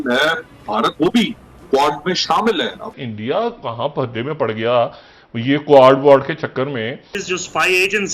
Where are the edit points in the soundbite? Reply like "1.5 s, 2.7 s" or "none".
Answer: 3.0 s, 7.2 s